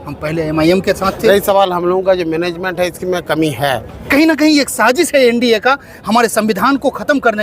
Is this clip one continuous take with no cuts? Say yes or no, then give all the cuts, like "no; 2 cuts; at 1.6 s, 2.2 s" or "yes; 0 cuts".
no; 2 cuts; at 1.3 s, 3.9 s